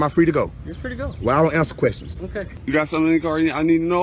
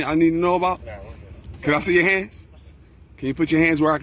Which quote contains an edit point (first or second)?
first